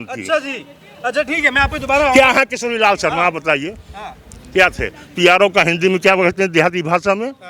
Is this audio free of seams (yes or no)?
yes